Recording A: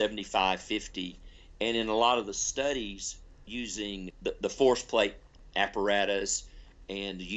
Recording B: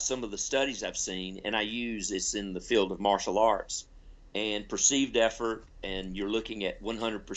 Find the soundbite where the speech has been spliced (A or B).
A